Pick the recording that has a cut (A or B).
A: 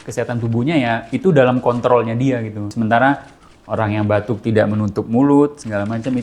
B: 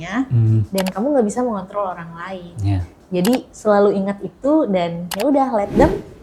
A